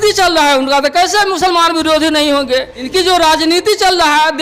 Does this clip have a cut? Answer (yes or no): yes